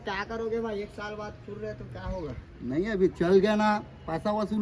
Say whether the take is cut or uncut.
uncut